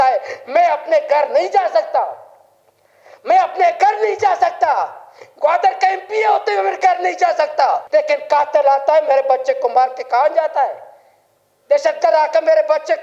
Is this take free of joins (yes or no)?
no